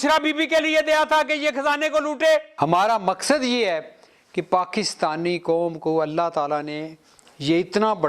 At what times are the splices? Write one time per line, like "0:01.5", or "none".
0:02.5